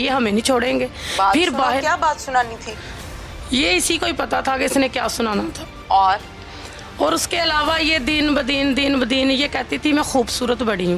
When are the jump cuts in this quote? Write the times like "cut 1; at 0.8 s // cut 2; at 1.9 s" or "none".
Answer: none